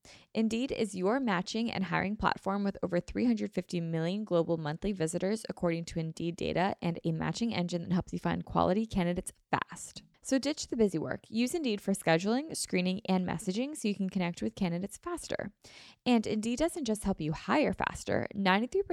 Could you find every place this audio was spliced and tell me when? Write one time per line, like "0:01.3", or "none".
none